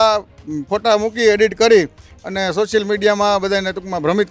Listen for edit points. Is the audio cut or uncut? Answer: uncut